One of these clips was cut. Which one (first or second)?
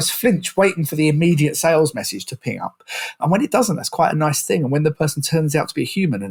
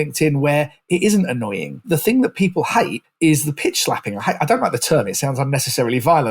second